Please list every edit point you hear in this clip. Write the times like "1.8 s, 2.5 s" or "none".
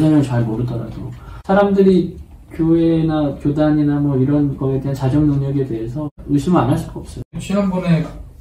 6.1 s